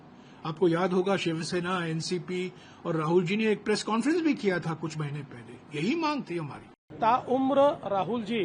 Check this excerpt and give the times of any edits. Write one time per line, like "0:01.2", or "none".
0:06.9

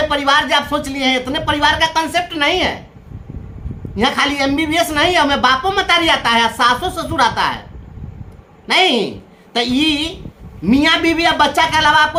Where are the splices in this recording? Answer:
none

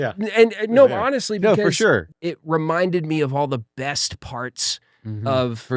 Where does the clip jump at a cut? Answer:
0:02.1

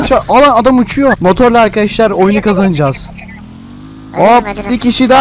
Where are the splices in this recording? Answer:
0:01.2

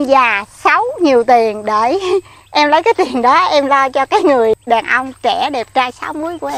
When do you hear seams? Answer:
0:04.5

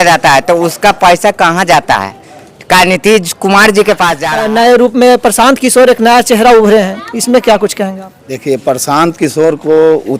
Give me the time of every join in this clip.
0:04.2

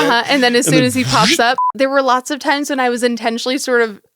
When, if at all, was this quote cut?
0:01.7

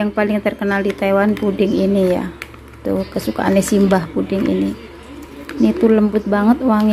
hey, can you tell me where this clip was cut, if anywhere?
none

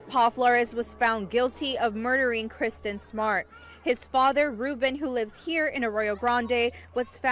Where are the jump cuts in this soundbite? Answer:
none

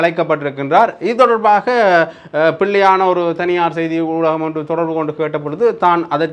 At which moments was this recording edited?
none

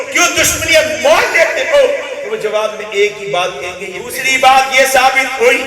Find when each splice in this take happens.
0:04.1

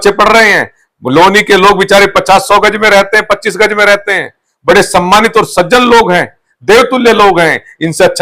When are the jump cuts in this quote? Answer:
none

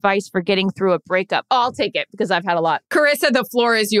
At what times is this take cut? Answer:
0:02.8

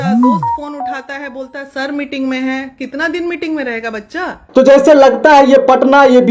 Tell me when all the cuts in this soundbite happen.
none

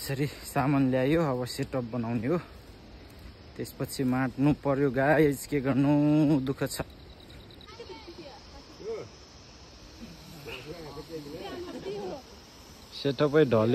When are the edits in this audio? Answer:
0:07.7

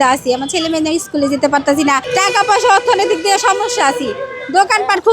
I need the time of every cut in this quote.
0:02.1

